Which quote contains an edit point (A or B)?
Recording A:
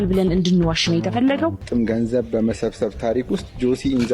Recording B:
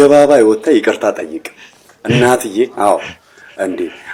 A